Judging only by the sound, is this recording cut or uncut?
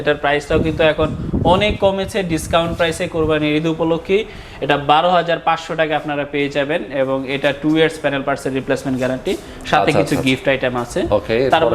uncut